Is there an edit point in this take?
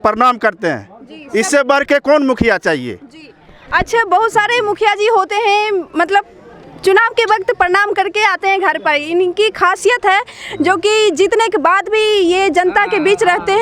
no; 0 cuts

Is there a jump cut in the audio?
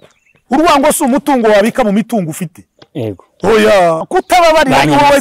yes; 1 cut; at 4.1 s

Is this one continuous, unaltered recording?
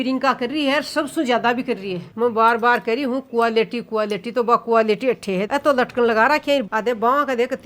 yes; 0 cuts

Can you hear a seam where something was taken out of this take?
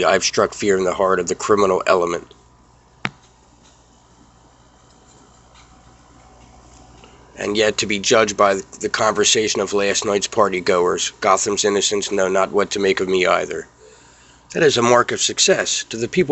no; 0 cuts

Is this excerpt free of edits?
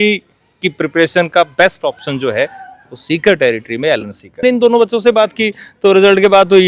no; 1 cut; at 4.4 s

